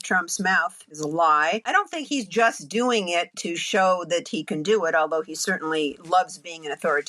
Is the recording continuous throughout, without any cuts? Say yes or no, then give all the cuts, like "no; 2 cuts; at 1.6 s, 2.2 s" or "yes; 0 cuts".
no; 2 cuts; at 0.9 s, 1.7 s